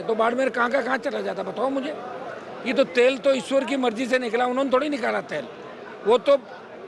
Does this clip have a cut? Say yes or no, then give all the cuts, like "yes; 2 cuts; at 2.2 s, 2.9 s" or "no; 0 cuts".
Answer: no; 0 cuts